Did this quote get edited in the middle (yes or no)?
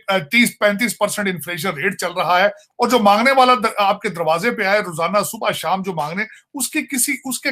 yes